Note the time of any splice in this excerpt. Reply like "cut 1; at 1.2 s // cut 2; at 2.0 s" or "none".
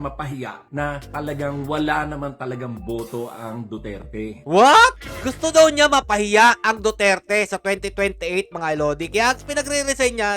none

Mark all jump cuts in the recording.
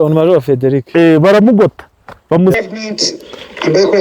cut 1; at 2.5 s

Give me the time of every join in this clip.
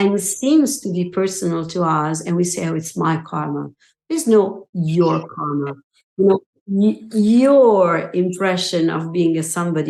none

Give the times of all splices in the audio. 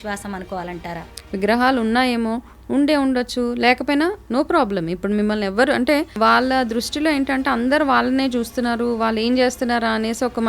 cut 1; at 1.1 s // cut 2; at 6.1 s

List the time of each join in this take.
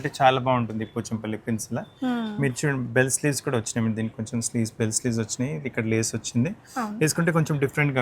none

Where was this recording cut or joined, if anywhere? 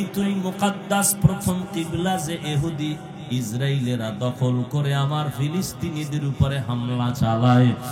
none

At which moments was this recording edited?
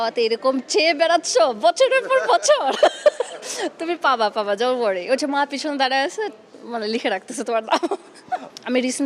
none

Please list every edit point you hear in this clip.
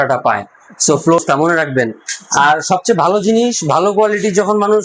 cut 1; at 1.2 s

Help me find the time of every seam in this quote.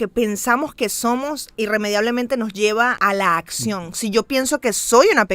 cut 1; at 3.0 s

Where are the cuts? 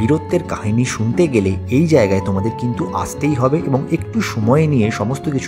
none

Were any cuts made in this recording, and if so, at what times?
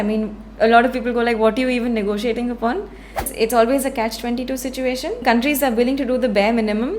cut 1; at 3.3 s // cut 2; at 5.2 s

